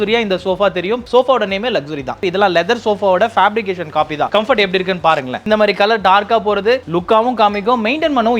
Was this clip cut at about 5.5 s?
yes; 2 cuts; at 2.2 s, 5.5 s

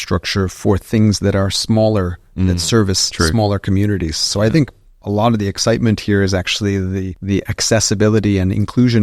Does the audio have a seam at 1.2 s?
no; 1 cut; at 7.1 s

